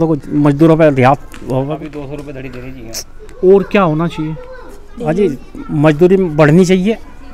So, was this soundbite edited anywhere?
yes; 1 cut; at 1.8 s

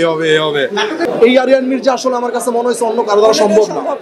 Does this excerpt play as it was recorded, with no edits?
no; 1 cut; at 1.0 s

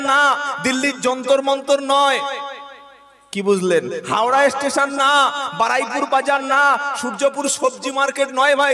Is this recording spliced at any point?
no; 0 cuts

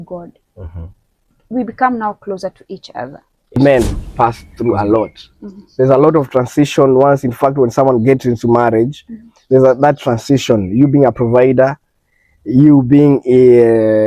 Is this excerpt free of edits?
no; 2 cuts; at 1.4 s, 3.6 s

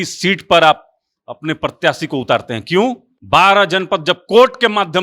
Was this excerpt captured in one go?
no; 1 cut; at 3.1 s

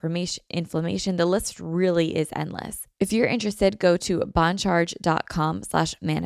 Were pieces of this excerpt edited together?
yes; 1 cut; at 2.8 s

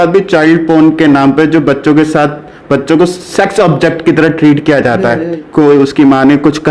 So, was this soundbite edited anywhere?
yes; 1 cut; at 5.4 s

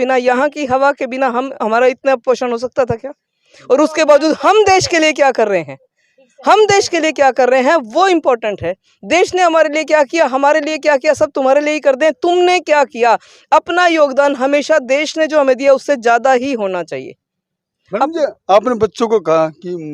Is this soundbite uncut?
yes; 0 cuts

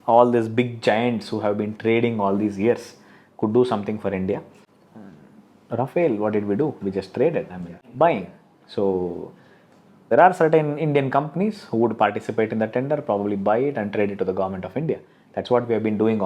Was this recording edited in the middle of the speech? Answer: yes; 2 cuts; at 4.6 s, 7.8 s

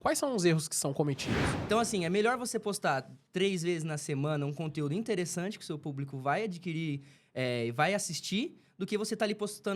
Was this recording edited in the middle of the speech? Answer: yes; 1 cut; at 1.4 s

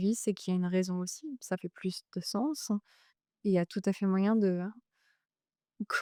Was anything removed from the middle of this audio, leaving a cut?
no; 0 cuts

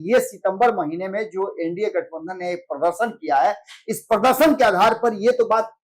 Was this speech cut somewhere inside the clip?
no; 0 cuts

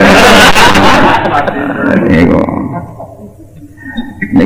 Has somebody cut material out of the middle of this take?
no; 0 cuts

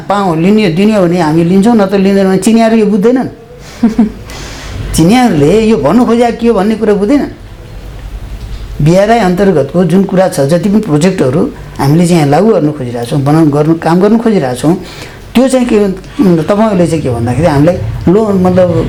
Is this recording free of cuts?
yes; 0 cuts

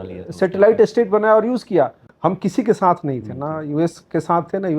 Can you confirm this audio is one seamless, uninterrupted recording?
no; 1 cut; at 2.0 s

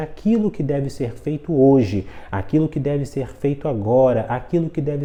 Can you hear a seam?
no; 0 cuts

